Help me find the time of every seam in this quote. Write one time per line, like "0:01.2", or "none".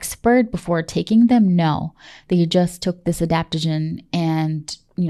none